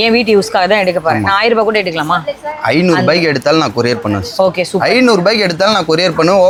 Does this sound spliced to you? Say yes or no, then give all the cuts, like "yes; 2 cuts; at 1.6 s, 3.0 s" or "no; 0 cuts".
no; 0 cuts